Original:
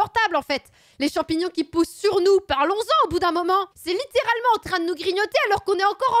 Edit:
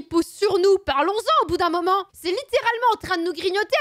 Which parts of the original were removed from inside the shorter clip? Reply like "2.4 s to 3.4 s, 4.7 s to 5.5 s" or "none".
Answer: none

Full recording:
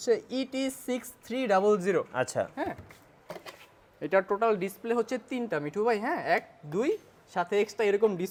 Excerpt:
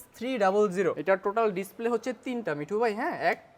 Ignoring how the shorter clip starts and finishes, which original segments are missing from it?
2.1 s to 4.0 s

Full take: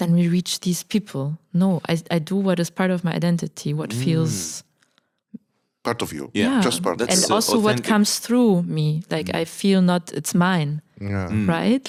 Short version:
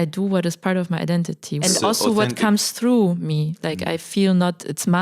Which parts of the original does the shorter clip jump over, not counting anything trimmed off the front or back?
3.8 s to 7.1 s

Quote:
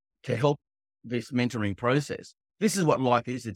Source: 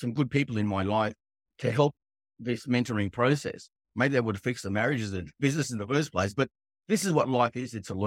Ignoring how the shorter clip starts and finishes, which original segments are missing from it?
3.7 s to 6.7 s

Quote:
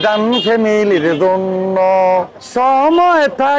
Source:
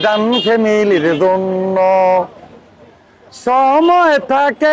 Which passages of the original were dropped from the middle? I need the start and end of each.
2.4 s to 3.3 s

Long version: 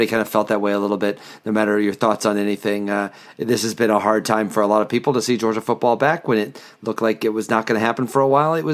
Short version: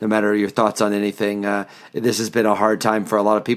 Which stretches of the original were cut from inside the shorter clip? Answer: none

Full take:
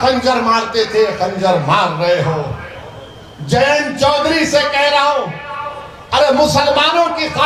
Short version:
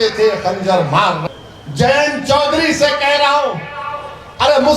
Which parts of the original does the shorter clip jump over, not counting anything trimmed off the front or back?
2.0 s to 2.9 s

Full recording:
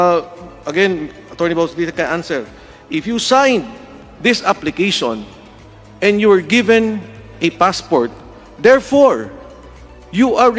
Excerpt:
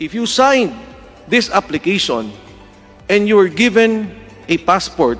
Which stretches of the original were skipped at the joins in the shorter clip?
none

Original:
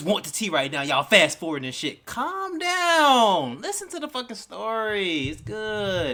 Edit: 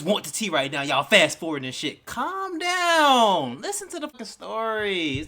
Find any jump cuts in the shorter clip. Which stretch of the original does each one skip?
4.1 s to 4.2 s

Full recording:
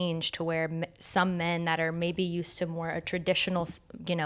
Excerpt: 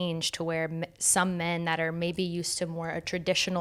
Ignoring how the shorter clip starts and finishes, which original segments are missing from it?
none

